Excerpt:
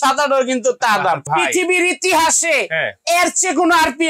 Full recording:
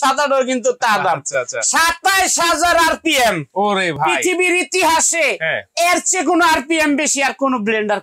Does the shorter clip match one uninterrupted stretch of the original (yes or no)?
no